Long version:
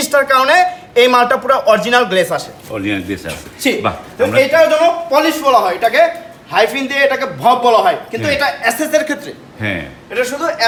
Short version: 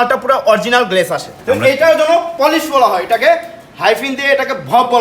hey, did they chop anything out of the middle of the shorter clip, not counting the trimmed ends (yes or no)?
yes